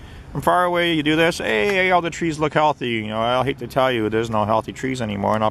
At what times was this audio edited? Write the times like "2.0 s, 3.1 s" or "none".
none